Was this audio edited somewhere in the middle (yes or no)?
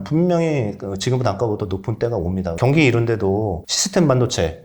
yes